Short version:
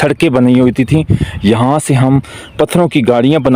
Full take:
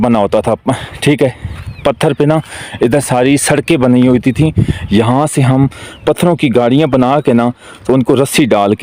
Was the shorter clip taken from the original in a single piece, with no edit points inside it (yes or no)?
yes